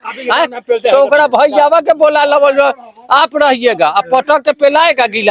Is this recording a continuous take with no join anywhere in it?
yes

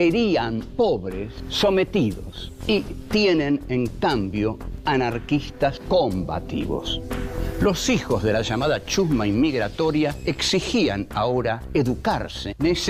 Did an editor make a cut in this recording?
no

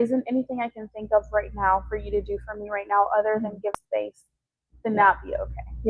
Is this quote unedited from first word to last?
no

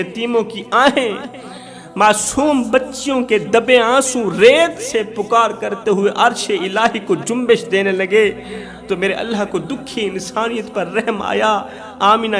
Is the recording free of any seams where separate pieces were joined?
yes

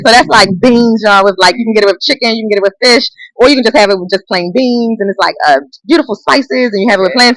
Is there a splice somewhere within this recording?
no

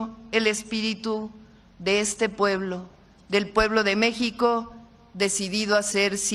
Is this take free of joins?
yes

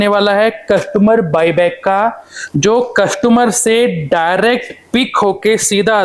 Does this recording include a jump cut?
no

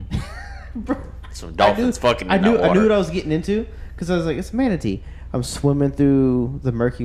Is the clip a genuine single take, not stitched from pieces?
yes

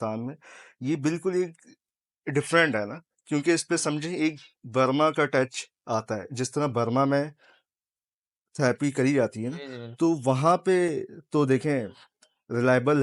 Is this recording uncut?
yes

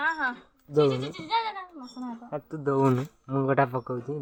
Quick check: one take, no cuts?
yes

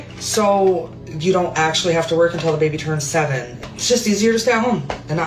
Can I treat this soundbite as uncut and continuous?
no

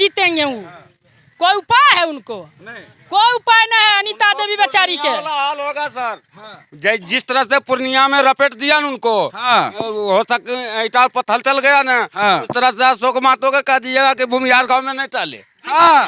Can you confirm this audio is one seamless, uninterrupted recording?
yes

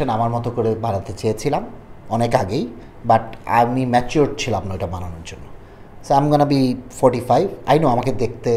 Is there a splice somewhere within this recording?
no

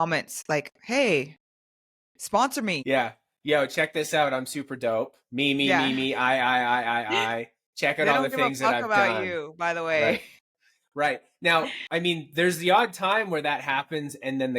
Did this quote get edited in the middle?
yes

